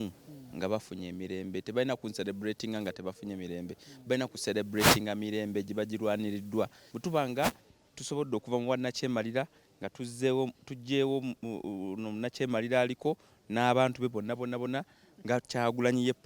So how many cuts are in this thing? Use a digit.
1